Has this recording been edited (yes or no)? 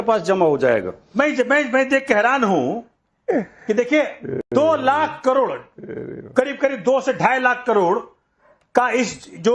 yes